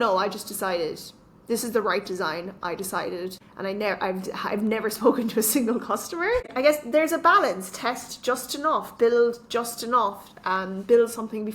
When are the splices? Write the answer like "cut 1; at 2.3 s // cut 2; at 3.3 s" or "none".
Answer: cut 1; at 3.4 s // cut 2; at 6.5 s